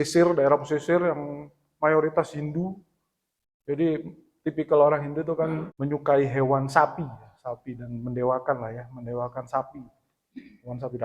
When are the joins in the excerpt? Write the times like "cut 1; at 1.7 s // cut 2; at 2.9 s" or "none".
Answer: cut 1; at 5.7 s